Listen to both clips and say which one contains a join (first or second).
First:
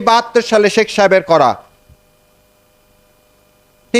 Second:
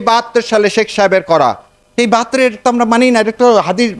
second